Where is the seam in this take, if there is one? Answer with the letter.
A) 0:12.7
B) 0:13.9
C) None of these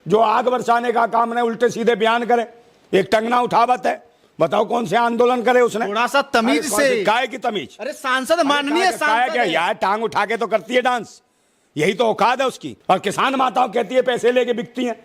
A